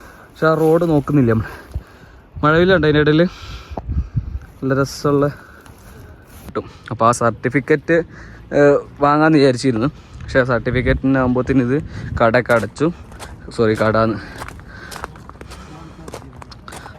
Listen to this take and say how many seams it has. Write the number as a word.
one